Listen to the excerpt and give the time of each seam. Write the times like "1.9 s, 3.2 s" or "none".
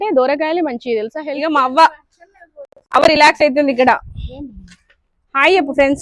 1.3 s